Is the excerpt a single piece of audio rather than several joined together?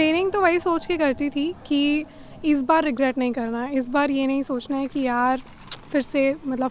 yes; 0 cuts

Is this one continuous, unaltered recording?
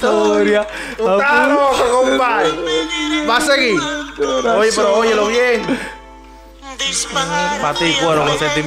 yes; 0 cuts

